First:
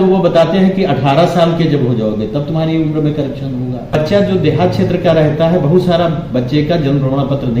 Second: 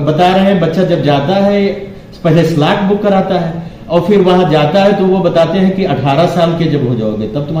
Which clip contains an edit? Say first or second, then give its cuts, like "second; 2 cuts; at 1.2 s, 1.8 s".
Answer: first; 1 cut; at 4.0 s